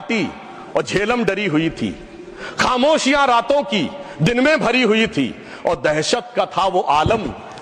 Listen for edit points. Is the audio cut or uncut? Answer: uncut